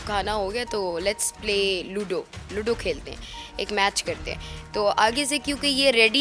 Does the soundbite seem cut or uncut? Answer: uncut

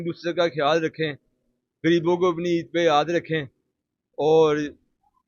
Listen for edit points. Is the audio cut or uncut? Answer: uncut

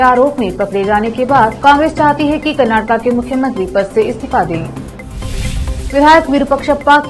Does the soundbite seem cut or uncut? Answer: uncut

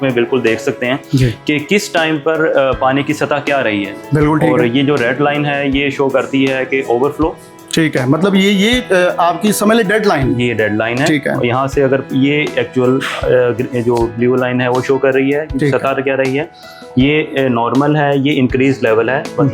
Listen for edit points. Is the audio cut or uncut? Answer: uncut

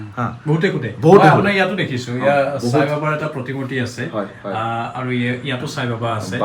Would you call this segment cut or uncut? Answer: uncut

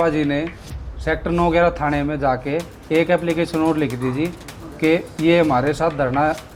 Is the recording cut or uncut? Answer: uncut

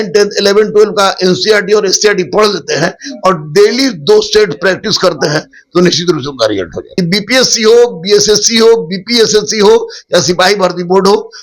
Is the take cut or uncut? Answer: cut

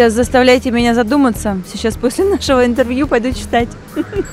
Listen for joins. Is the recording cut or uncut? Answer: uncut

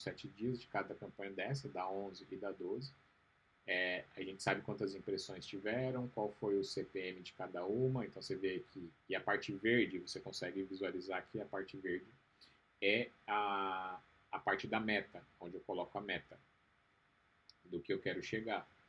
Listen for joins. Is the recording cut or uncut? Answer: uncut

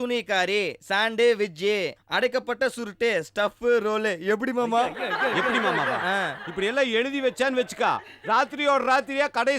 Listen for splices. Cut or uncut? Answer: uncut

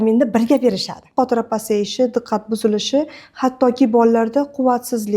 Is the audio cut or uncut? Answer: cut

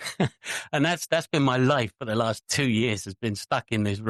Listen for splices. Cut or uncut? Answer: uncut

